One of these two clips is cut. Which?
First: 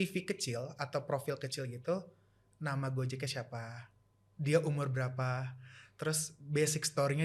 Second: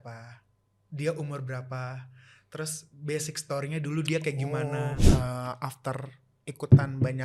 second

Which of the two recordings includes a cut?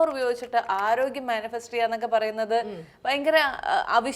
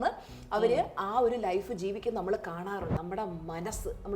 second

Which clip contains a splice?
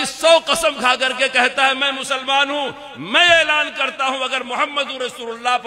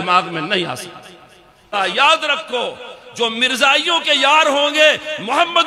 second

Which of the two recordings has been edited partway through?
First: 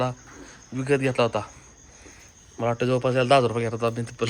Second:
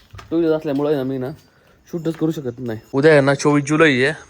second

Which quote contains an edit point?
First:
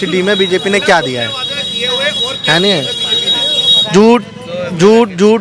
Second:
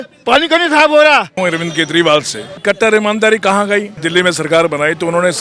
second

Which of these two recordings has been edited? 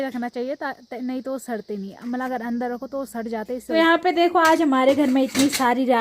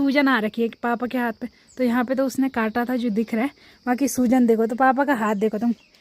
first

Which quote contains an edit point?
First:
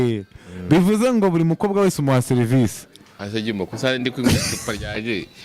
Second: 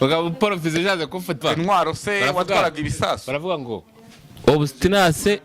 second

